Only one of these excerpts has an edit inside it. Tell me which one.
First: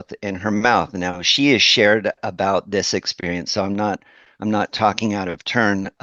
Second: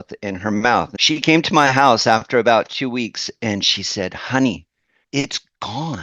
second; 2 cuts; at 0.9 s, 5.0 s

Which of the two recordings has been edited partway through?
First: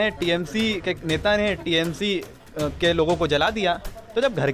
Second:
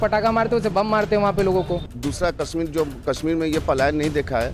second; 1 cut; at 1.9 s

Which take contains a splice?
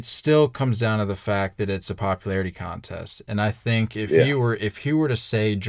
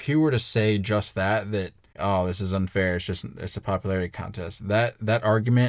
second; 1 cut; at 1.9 s

